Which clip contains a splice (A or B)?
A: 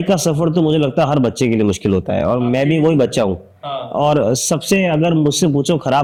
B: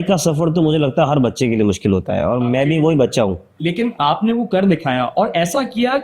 B